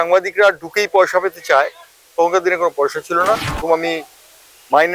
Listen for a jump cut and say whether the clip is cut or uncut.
cut